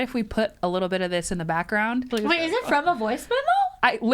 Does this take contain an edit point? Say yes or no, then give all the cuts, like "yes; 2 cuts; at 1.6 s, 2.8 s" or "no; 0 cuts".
yes; 1 cut; at 2.1 s